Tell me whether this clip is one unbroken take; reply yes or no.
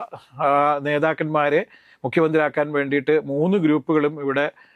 yes